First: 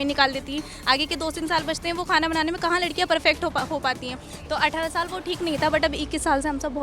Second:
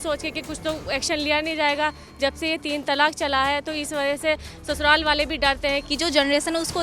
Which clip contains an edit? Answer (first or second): second